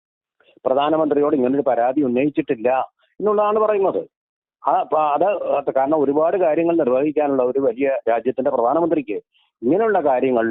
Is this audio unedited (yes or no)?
yes